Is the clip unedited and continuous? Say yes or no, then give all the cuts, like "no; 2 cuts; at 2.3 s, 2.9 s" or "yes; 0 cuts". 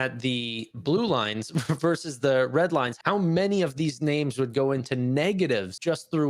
yes; 0 cuts